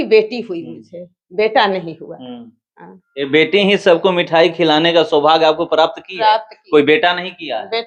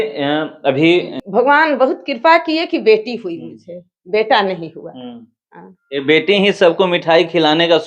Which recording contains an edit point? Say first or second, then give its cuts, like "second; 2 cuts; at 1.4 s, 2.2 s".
second; 1 cut; at 1.2 s